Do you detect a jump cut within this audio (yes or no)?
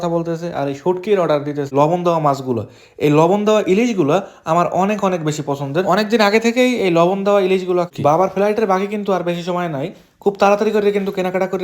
yes